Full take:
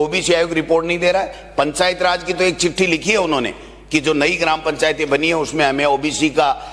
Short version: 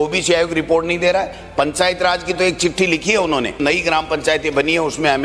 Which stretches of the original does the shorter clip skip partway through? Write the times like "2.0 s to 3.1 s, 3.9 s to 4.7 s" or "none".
3.6 s to 4.1 s